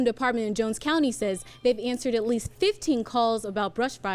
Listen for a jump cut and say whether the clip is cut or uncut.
uncut